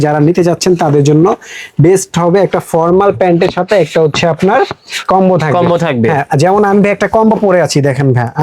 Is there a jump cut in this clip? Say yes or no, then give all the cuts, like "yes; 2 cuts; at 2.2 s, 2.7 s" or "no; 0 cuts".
no; 0 cuts